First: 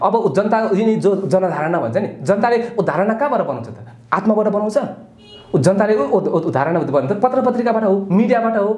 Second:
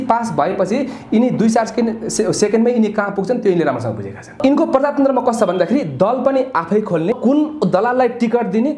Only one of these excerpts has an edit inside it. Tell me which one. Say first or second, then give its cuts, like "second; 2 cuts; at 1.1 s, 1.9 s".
second; 2 cuts; at 4.4 s, 7.1 s